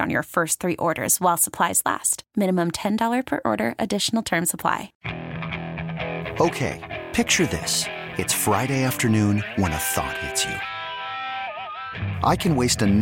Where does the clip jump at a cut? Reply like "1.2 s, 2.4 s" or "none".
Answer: 4.9 s